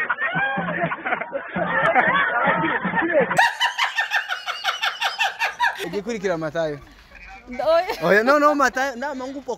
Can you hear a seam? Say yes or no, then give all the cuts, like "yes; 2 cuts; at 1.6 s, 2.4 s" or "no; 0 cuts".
yes; 1 cut; at 5.8 s